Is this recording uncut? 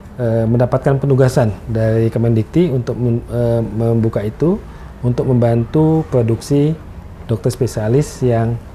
yes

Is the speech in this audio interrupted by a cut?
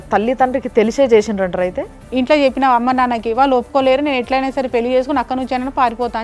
yes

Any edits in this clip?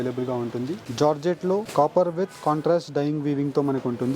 yes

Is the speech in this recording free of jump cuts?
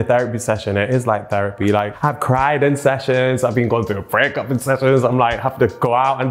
no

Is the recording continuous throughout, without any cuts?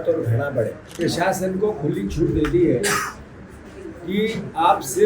no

